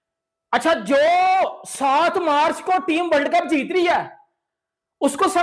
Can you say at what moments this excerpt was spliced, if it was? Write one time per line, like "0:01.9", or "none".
none